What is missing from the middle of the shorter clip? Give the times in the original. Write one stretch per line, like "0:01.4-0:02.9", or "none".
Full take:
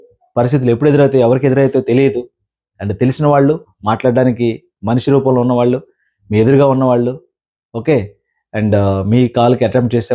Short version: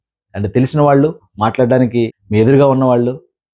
0:04.6-0:06.2